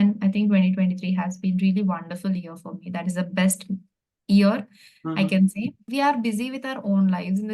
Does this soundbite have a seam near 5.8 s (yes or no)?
yes